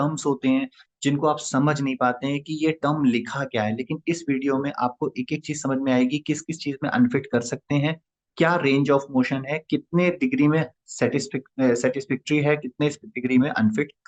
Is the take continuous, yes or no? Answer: yes